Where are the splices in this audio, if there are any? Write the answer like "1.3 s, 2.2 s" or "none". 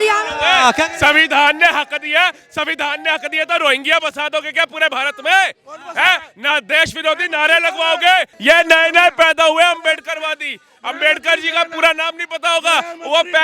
8.3 s